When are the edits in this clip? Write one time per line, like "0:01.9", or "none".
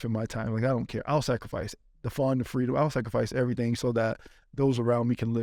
none